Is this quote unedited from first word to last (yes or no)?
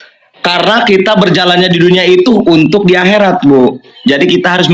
yes